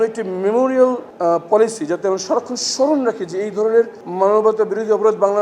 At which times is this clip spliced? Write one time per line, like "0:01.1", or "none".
0:01.1
0:04.0